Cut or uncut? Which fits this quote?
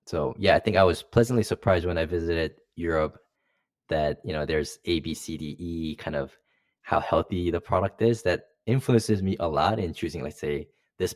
uncut